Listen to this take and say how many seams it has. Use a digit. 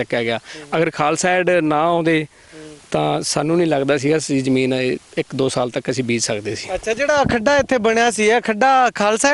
0